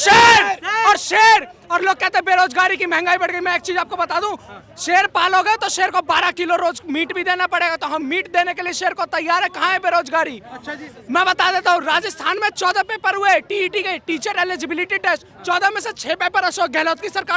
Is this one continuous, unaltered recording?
yes; 0 cuts

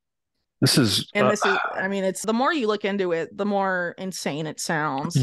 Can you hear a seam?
yes; 1 cut; at 2.2 s

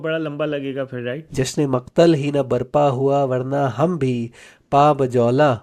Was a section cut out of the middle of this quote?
yes; 1 cut; at 1.2 s

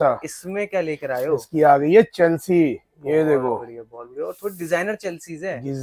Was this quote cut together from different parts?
no; 0 cuts

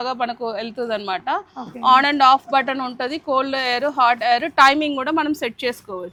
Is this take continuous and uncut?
yes; 0 cuts

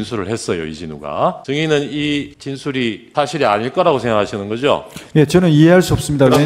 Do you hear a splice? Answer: yes; 2 cuts; at 1.4 s, 2.7 s

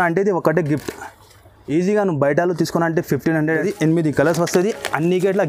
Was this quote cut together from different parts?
yes; 1 cut; at 3.6 s

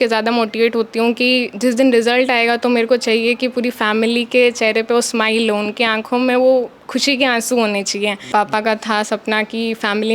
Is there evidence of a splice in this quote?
yes; 1 cut; at 8.2 s

